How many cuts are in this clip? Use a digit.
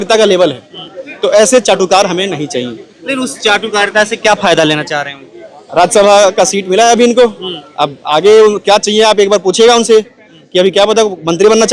0